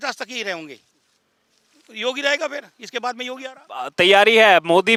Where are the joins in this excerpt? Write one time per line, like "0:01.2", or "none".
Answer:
none

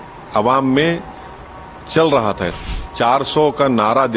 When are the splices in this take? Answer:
0:02.6

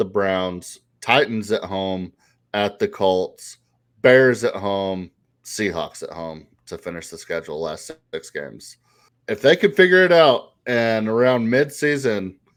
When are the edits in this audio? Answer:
none

